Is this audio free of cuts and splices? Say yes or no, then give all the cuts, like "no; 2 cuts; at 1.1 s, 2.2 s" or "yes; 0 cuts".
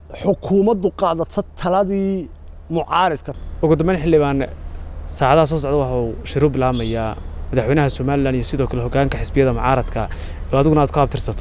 no; 1 cut; at 3.3 s